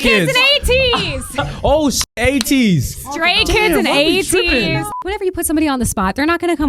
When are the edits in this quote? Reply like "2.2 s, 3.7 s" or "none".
5.0 s